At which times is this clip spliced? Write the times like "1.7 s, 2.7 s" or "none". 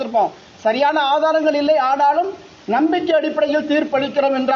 none